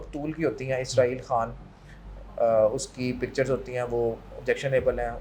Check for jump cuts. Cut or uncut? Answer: uncut